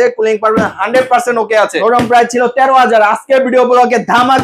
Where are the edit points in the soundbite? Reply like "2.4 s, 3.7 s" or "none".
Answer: 1.8 s